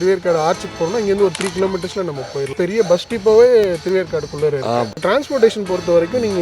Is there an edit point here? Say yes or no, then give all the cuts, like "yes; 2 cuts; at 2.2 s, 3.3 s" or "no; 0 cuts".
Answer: yes; 2 cuts; at 2.5 s, 5.0 s